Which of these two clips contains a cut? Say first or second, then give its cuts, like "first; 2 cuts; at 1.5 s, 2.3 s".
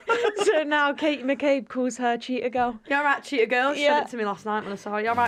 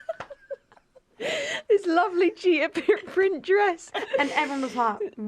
second; 1 cut; at 3.9 s